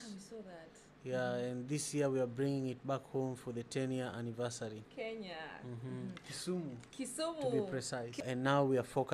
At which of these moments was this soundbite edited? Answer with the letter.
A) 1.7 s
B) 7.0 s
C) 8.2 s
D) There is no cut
C